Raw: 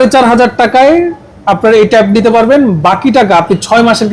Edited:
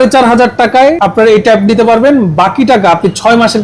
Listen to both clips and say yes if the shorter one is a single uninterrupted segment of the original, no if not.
no